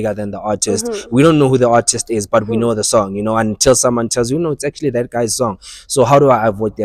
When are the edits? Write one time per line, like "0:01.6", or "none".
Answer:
none